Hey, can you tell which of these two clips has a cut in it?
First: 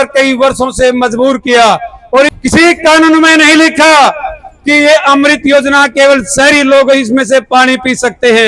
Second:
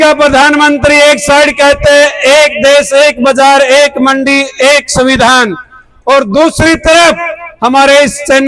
first; 1 cut; at 2.3 s

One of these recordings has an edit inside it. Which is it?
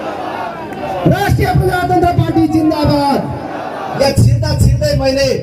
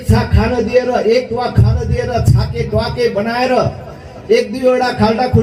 first; 1 cut; at 4.0 s

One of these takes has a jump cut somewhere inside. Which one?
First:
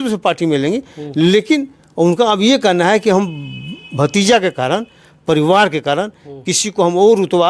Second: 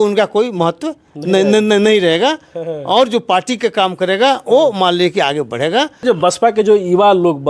second; 1 cut; at 6.0 s

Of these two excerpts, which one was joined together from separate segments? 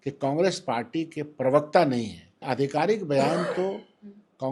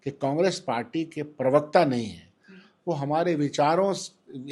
first; 1 cut; at 2.4 s

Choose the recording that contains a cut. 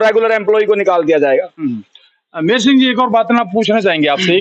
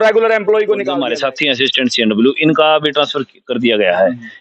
second; 1 cut; at 0.9 s

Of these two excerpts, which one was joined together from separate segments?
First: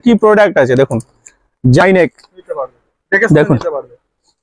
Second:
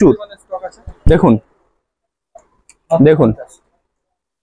first; 1 cut; at 1.8 s

